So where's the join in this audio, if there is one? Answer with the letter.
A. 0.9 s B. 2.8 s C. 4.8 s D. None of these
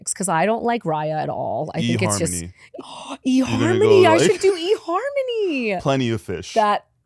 B